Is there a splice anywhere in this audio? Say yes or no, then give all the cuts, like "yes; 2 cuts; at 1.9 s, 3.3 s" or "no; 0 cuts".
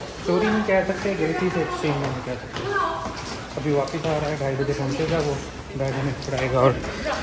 no; 0 cuts